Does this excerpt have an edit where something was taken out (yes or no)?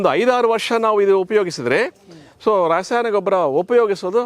no